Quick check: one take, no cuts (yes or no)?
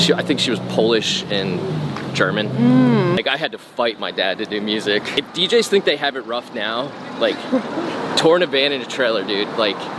no